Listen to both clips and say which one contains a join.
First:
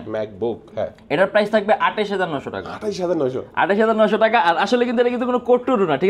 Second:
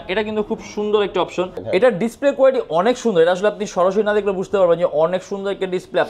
second; 1 cut; at 1.6 s

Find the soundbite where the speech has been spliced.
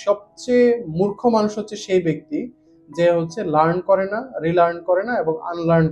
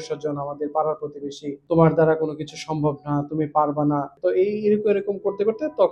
second; 2 cuts; at 1.6 s, 4.1 s

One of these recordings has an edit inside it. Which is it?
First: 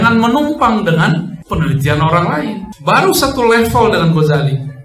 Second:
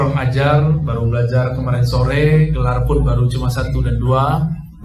first; 2 cuts; at 1.4 s, 2.7 s

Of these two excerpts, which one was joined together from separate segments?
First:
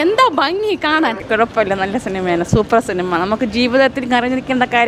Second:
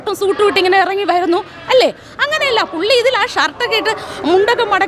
first; 1 cut; at 1.2 s

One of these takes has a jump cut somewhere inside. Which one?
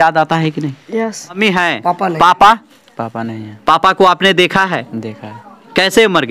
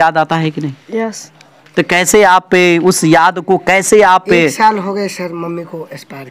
first; 1 cut; at 1.4 s

